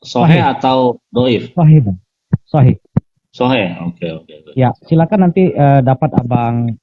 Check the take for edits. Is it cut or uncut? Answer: cut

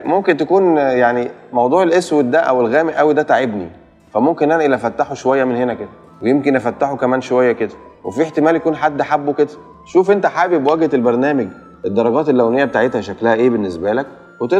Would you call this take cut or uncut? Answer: uncut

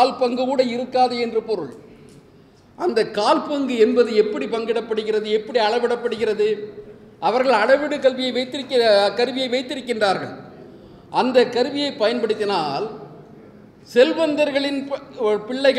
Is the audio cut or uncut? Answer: uncut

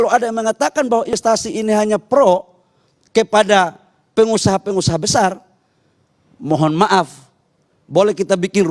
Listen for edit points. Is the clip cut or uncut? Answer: cut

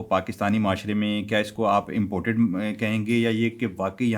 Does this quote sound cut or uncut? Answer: uncut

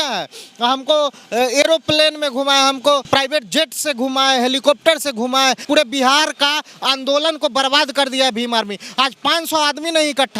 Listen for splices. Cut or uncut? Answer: cut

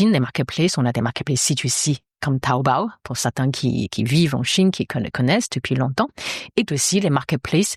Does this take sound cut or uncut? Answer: uncut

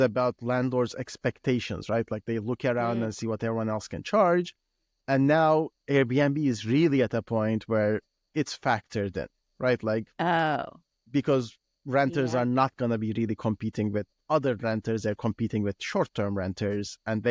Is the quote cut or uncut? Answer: uncut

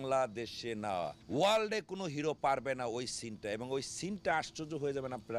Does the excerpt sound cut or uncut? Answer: cut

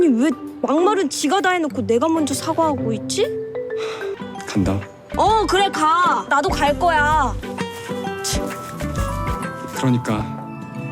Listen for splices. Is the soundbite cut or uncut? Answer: cut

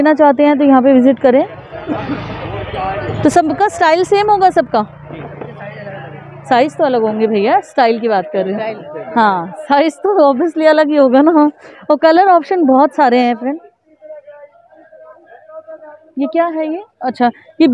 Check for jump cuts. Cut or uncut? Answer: uncut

